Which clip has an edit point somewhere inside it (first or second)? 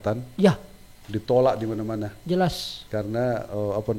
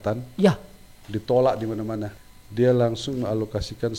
second